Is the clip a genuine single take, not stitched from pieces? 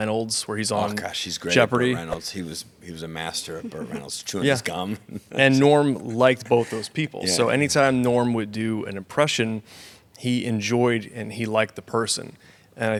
yes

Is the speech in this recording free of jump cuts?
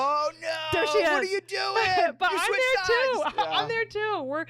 yes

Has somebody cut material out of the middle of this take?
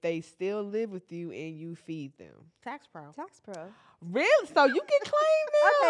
no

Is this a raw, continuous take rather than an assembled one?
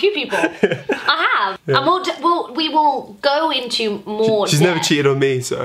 no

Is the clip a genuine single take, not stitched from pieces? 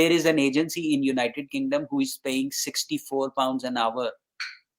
yes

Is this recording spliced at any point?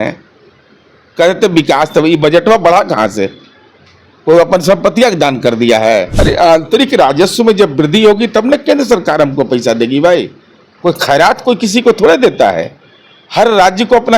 yes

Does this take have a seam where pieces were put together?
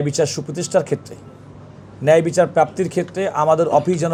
no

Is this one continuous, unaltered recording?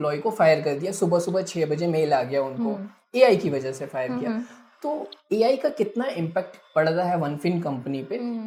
yes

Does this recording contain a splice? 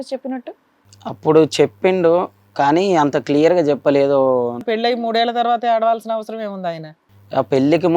yes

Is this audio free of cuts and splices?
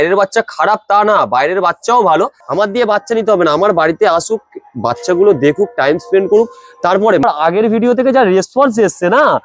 no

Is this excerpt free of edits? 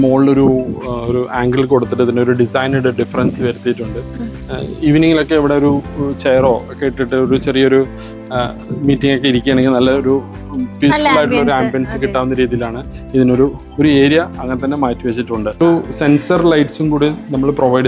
no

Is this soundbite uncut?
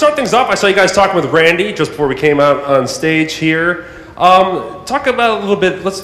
no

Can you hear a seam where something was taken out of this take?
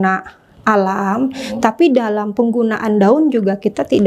no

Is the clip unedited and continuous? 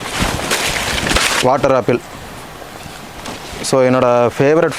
no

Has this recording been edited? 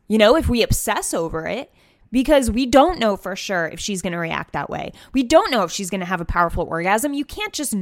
yes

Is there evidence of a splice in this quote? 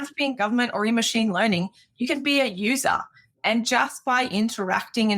no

